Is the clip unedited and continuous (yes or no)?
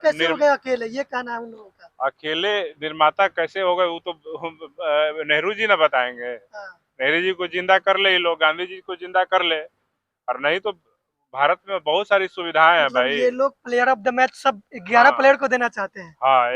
yes